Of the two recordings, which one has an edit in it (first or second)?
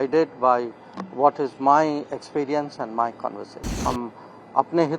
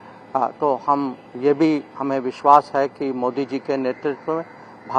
first